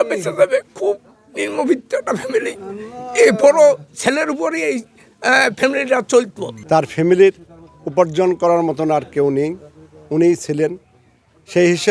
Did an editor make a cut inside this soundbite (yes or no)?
yes